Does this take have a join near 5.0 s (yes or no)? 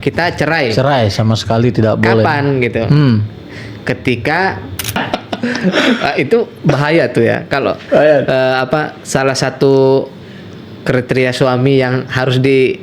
yes